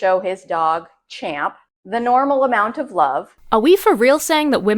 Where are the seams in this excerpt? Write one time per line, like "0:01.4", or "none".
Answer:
0:03.3